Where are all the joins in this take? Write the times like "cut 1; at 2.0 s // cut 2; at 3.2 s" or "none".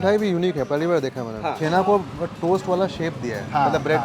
cut 1; at 1.3 s